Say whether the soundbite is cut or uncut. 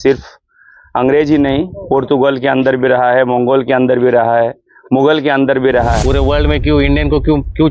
cut